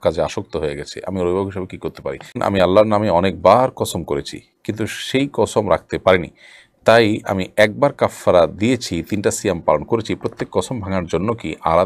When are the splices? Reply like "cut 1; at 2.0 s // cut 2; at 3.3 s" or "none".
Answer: cut 1; at 2.4 s